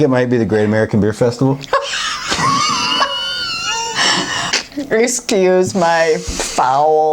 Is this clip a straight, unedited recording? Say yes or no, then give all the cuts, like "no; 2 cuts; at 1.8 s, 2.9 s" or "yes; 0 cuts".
no; 1 cut; at 4.4 s